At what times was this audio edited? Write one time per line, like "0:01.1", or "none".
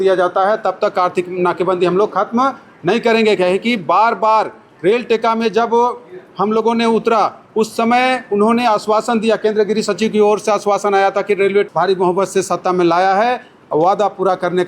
0:11.7